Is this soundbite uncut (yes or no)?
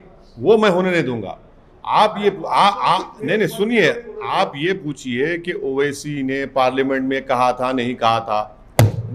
yes